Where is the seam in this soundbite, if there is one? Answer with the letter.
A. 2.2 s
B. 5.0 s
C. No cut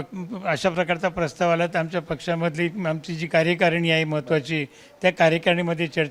C